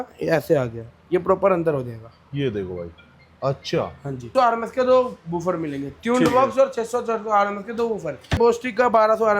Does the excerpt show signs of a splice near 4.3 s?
yes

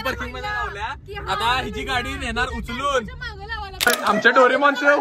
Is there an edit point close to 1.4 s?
no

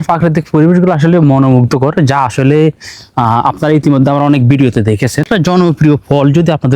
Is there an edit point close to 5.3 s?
yes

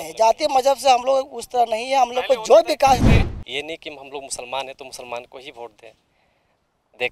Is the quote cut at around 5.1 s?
no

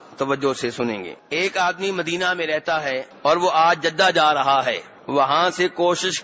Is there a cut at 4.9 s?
yes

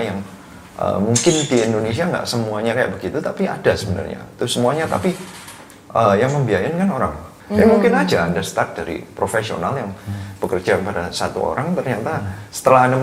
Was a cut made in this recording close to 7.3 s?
yes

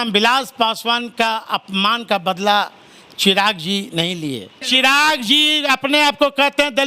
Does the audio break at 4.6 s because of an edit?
yes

